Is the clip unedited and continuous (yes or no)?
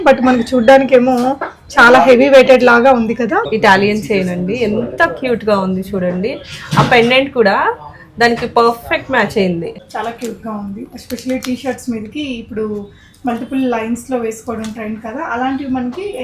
no